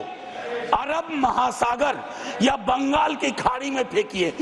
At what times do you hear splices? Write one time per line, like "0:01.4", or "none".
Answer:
none